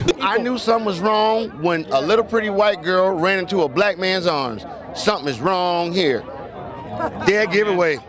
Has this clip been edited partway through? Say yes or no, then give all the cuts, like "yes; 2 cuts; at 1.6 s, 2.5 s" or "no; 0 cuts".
no; 0 cuts